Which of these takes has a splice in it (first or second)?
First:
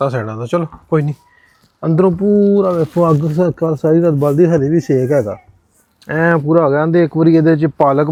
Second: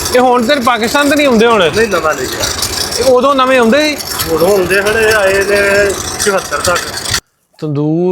second